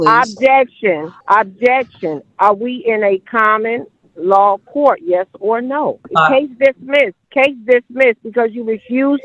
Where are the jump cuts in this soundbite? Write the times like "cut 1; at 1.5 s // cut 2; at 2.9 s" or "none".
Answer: cut 1; at 1.1 s // cut 2; at 6.0 s // cut 3; at 7.2 s